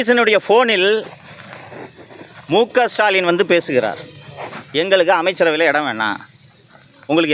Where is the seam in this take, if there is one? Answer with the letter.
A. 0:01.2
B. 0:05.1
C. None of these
C